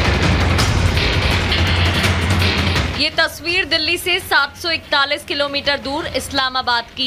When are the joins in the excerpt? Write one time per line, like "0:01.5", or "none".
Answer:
none